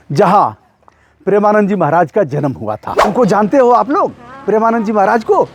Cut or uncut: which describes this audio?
cut